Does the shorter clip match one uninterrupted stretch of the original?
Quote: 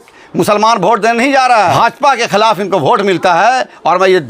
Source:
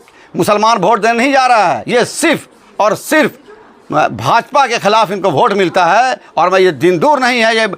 no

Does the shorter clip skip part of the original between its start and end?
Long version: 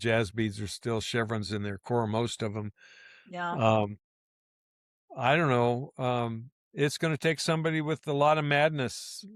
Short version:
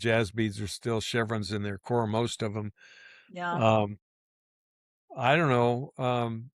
no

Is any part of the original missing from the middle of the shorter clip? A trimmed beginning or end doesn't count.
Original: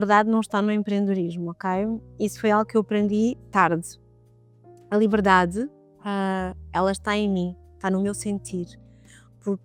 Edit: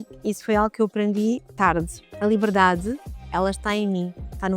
yes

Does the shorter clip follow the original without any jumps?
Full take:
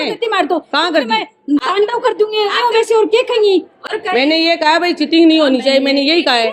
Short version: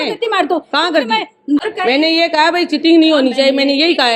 no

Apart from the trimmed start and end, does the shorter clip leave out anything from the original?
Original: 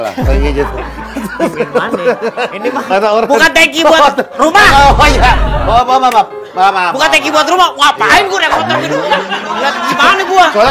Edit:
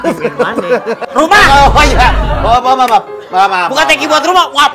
yes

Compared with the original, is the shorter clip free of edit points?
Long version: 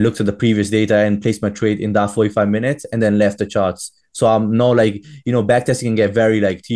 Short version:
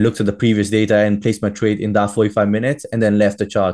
yes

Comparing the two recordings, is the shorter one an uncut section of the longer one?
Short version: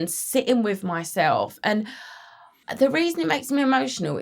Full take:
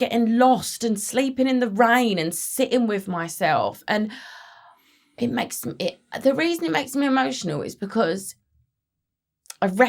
no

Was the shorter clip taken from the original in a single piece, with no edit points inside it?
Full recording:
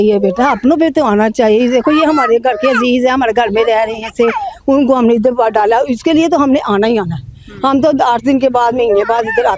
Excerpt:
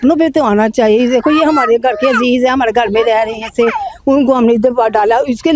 yes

